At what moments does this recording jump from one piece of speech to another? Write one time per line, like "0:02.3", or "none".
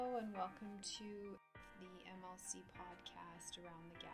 0:01.4